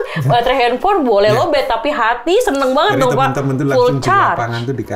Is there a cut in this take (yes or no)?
no